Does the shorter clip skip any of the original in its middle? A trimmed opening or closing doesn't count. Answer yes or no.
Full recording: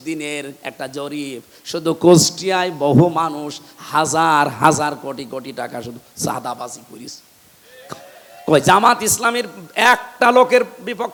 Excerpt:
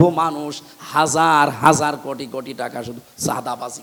no